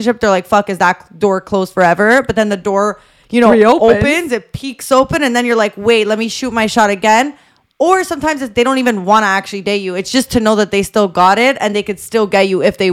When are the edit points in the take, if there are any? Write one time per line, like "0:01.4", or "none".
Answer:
none

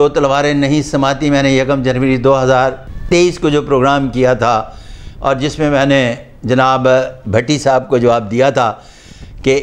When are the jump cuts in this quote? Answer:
0:02.9

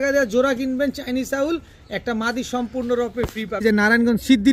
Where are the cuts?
0:03.6

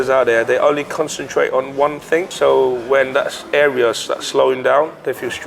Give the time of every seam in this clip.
none

